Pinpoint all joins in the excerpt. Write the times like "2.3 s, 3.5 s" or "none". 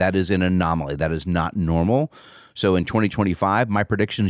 3.1 s